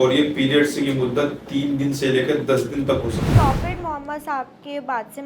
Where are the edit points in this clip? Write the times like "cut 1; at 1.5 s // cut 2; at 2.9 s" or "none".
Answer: cut 1; at 3.3 s

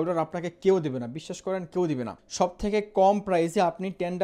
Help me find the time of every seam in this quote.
cut 1; at 2.2 s

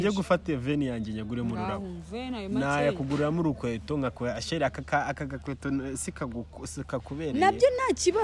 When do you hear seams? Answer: none

